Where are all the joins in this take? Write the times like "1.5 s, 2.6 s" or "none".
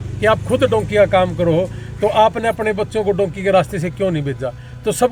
none